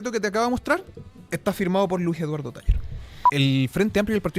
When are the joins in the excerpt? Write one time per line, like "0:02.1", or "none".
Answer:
0:03.2